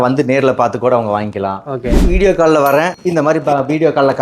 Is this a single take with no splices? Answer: no; 1 cut; at 2.1 s

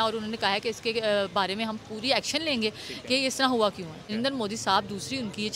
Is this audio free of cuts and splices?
no; 1 cut; at 3.9 s

